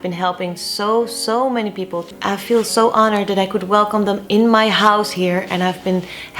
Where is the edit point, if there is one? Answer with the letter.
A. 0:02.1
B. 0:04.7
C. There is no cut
A